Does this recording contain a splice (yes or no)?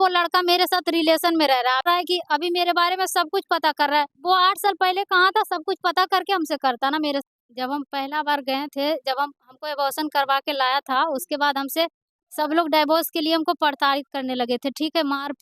yes